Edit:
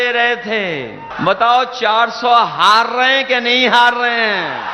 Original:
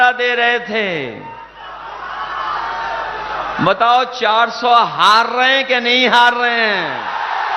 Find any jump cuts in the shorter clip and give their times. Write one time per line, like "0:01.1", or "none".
0:01.1